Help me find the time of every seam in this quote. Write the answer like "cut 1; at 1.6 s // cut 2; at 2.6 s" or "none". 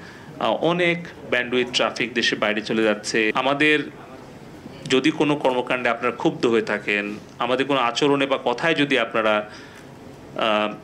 cut 1; at 3.3 s